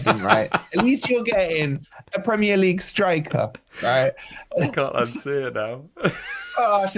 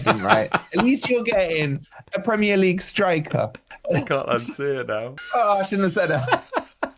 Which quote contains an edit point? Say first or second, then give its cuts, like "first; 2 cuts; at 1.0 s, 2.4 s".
second; 2 cuts; at 3.6 s, 5.2 s